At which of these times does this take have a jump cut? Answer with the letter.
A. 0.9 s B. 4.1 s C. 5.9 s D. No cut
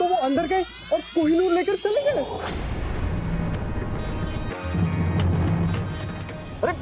B